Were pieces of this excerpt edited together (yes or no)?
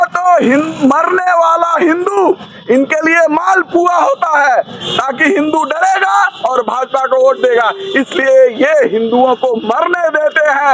no